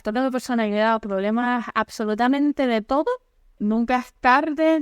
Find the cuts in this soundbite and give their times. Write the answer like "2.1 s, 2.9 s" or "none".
3.6 s